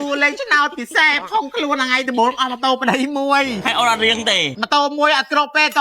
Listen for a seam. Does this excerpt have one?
yes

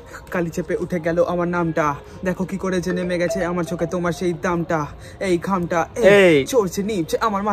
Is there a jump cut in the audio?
no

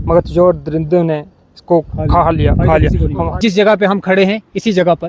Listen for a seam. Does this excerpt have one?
yes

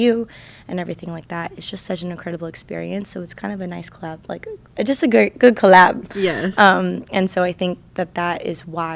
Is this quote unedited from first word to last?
yes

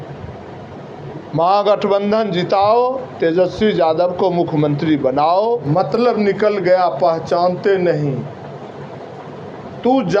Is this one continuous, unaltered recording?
no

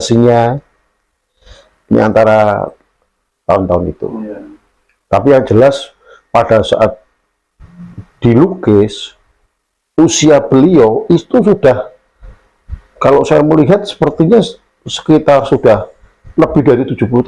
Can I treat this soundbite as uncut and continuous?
yes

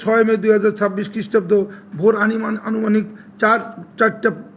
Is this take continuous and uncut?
yes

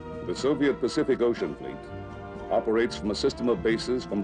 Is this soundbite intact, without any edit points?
no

